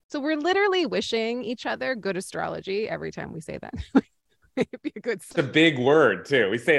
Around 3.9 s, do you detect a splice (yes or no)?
no